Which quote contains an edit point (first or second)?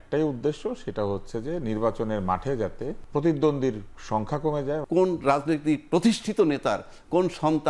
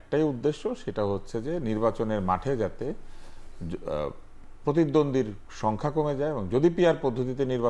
first